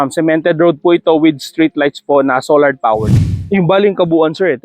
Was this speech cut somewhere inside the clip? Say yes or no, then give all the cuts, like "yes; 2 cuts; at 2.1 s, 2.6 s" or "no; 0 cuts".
yes; 1 cut; at 3.3 s